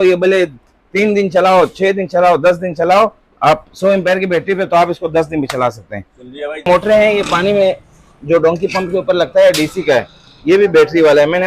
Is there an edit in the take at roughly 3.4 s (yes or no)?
no